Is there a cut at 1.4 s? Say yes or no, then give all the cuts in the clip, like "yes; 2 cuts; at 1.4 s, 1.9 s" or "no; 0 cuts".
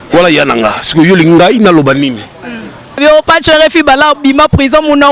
no; 1 cut; at 3.0 s